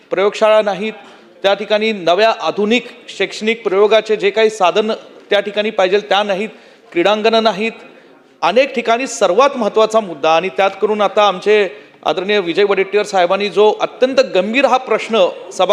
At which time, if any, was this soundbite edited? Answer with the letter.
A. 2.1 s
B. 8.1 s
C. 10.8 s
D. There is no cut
D